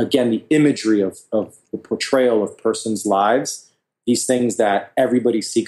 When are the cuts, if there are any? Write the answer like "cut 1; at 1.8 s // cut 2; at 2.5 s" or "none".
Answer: none